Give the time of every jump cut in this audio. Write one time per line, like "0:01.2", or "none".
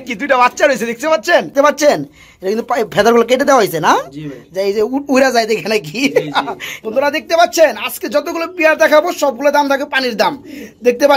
0:01.5
0:06.7